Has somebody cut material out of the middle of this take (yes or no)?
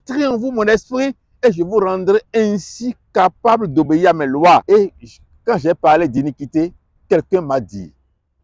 yes